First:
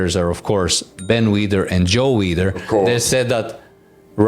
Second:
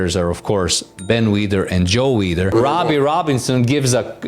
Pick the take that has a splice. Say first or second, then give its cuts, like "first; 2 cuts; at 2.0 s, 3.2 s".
second; 1 cut; at 2.5 s